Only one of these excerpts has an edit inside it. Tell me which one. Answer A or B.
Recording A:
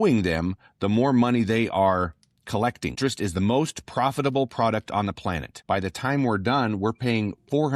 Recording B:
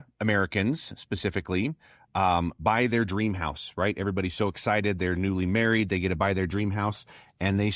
A